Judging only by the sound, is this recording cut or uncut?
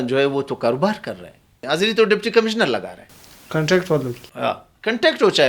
cut